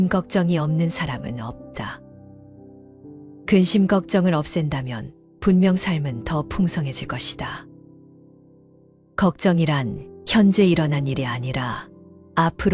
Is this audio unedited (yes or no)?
no